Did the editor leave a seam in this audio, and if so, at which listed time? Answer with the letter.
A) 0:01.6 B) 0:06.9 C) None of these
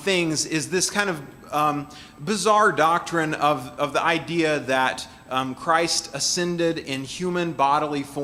C